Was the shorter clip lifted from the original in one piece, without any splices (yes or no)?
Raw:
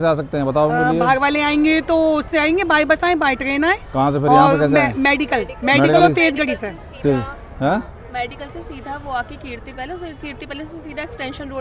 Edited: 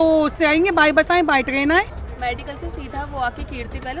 no